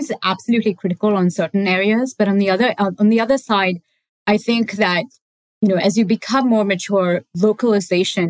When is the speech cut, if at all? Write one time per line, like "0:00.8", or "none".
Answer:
none